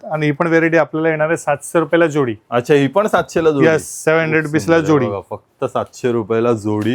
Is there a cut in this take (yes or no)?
no